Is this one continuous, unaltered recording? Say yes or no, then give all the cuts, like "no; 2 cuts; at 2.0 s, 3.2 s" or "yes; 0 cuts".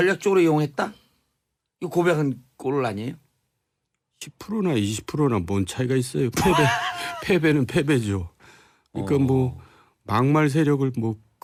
yes; 0 cuts